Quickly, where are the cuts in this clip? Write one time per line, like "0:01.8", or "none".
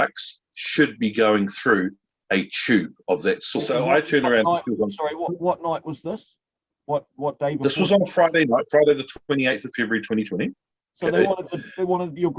0:03.5